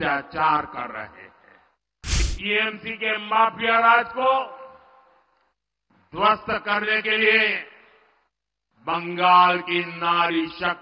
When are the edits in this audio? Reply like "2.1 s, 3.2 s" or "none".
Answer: 2.2 s